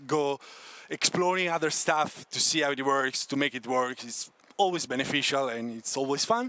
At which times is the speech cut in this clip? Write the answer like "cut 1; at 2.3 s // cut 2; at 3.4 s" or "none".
none

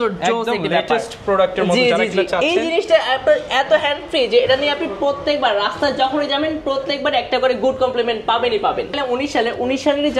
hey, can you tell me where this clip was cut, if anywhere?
none

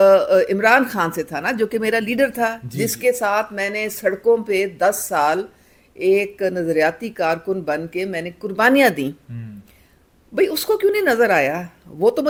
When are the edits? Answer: none

